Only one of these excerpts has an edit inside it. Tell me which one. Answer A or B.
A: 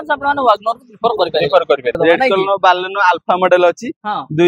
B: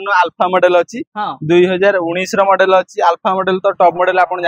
A